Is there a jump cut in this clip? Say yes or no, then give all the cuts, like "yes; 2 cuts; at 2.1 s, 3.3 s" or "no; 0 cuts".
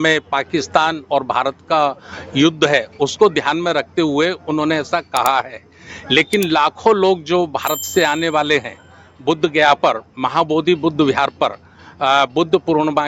no; 0 cuts